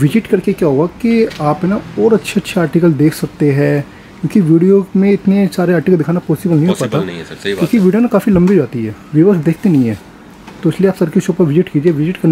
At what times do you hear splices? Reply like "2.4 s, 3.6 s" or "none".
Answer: none